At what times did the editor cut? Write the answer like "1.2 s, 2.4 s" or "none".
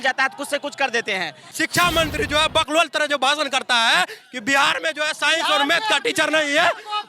1.5 s